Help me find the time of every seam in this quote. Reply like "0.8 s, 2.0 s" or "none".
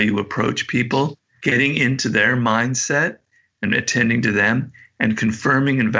1.3 s

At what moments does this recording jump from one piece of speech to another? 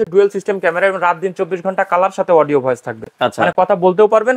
none

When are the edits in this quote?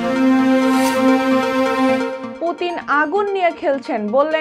2.2 s

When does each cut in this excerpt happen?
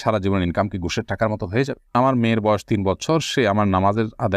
1.9 s

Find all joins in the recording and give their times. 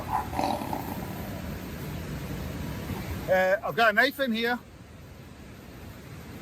2.9 s

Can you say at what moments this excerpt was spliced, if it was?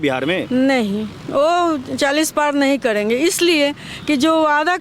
none

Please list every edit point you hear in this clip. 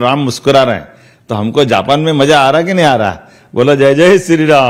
none

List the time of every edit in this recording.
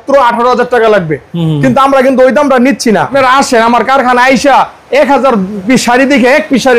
3.1 s

